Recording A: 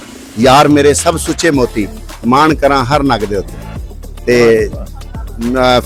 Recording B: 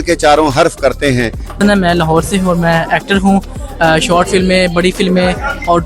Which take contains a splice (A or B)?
B